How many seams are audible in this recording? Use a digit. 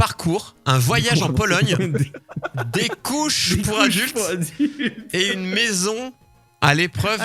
0